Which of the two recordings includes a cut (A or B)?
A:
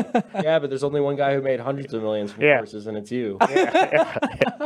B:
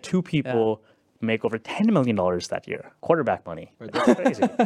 B